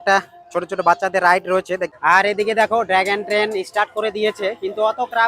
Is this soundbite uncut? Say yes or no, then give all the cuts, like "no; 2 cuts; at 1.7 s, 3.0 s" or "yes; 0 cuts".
no; 1 cut; at 1.9 s